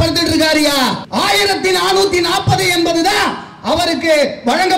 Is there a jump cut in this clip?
yes; 1 cut; at 1.0 s

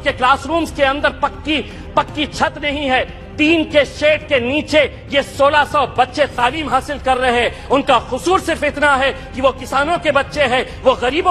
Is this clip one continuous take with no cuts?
yes; 0 cuts

